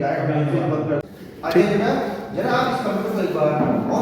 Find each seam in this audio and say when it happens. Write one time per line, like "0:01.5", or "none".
0:01.0